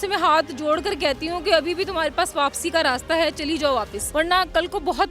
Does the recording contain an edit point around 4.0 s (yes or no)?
yes